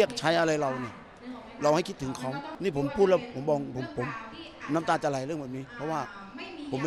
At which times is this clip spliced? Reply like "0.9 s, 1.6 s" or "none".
2.5 s